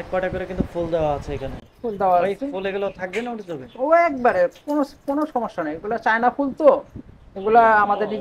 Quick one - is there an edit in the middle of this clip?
no; 0 cuts

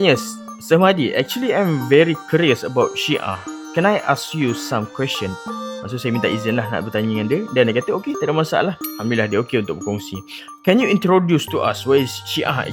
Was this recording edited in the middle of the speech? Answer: no; 0 cuts

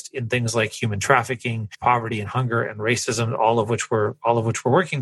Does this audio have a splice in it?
yes; 1 cut; at 1.7 s

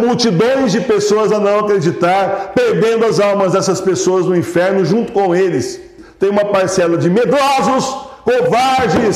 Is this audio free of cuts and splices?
no; 1 cut; at 6.0 s

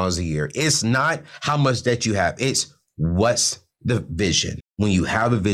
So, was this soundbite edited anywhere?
yes; 1 cut; at 4.6 s

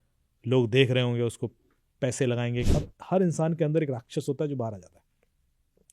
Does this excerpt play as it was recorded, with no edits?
no; 1 cut; at 2.7 s

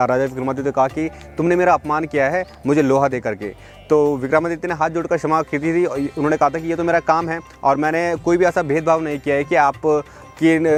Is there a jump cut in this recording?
no; 0 cuts

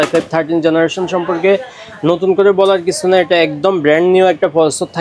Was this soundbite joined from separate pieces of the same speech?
no; 0 cuts

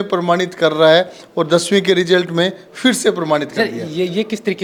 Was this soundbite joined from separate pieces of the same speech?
no; 0 cuts

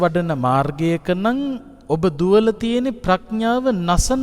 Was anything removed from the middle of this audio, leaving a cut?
yes; 1 cut; at 1.7 s

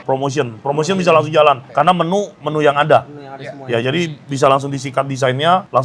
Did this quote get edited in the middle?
no; 0 cuts

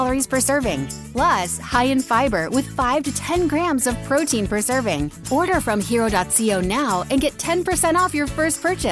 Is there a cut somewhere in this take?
yes; 2 cuts; at 1.0 s, 5.2 s

